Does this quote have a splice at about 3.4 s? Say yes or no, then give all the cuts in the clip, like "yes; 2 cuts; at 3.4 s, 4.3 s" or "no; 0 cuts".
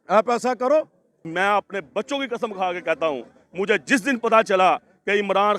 no; 1 cut; at 1.3 s